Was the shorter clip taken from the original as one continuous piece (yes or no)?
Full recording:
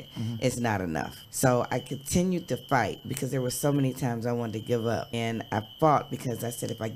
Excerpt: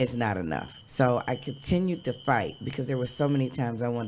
yes